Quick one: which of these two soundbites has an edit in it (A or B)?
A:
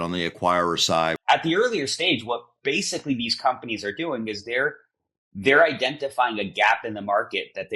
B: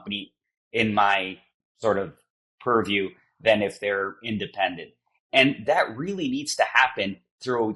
A